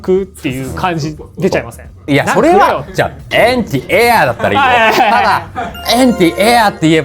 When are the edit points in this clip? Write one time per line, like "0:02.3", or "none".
0:02.1